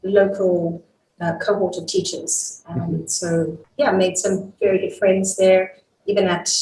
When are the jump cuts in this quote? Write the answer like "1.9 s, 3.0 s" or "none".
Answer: 3.6 s